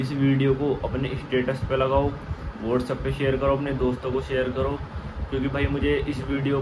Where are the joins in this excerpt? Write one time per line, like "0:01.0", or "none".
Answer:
none